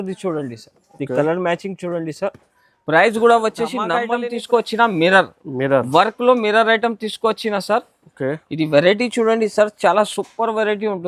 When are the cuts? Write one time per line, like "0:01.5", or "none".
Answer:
0:04.0